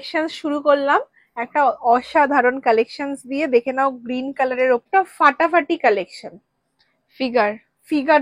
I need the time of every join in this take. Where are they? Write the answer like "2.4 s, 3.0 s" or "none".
4.8 s